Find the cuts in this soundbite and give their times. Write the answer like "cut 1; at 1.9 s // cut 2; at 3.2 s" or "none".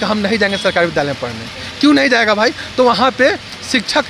none